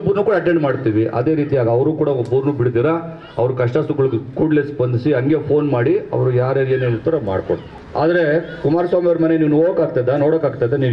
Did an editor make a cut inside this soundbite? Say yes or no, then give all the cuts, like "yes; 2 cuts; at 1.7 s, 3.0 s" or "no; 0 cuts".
yes; 1 cut; at 7.8 s